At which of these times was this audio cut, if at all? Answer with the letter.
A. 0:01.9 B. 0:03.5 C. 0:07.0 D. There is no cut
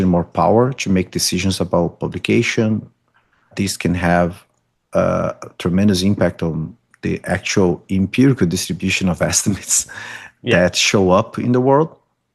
B